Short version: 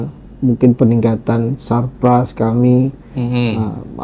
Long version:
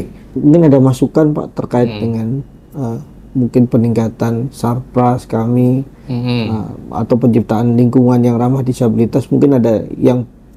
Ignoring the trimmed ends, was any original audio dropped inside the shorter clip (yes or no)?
no